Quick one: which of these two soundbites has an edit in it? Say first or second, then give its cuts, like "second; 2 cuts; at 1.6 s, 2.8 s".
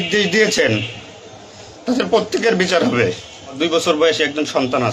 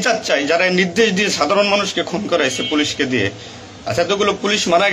first; 1 cut; at 3.6 s